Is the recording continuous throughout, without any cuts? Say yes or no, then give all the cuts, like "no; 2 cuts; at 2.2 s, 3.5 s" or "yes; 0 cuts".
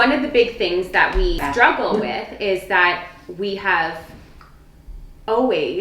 no; 1 cut; at 1.4 s